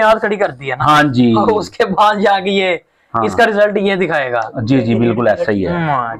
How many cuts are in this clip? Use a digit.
0